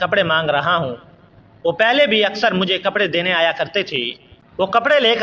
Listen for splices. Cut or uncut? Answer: uncut